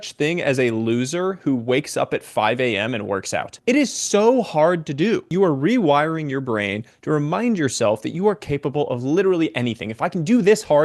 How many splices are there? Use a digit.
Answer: 2